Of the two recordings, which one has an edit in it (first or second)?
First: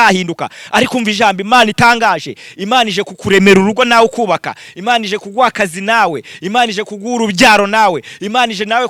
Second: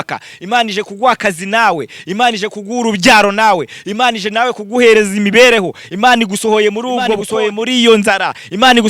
second